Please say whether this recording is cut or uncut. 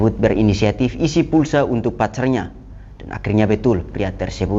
uncut